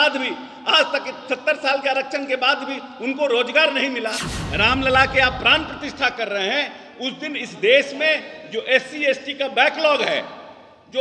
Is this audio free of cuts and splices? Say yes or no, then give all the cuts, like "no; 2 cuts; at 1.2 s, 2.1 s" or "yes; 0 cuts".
no; 1 cut; at 4.3 s